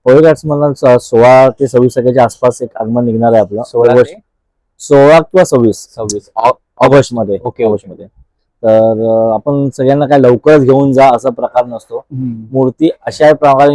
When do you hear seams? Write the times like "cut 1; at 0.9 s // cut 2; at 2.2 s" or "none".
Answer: none